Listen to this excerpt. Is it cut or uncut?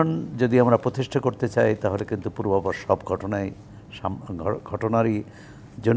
uncut